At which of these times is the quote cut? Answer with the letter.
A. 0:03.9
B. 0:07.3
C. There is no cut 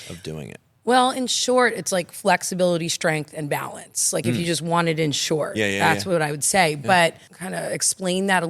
B